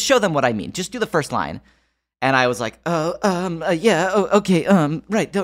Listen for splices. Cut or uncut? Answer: uncut